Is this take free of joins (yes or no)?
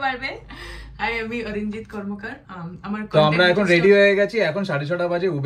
no